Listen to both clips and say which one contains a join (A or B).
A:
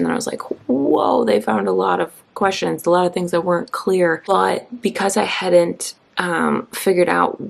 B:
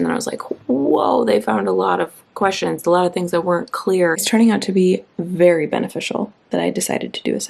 B